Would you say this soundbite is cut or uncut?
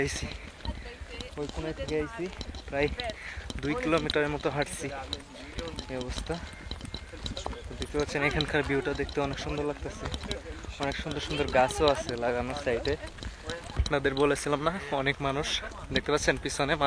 uncut